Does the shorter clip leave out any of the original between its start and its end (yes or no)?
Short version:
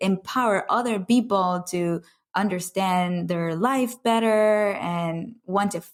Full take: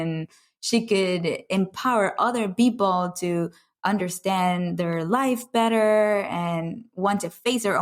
no